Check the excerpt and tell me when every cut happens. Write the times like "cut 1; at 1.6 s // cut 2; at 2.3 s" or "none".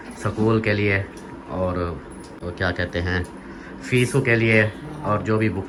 none